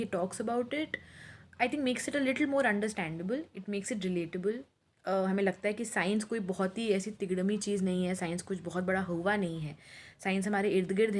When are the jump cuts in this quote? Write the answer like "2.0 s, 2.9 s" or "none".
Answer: none